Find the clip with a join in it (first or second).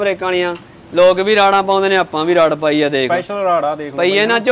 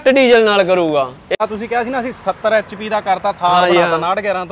second